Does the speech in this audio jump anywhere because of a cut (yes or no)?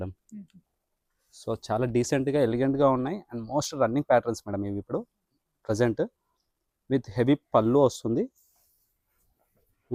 no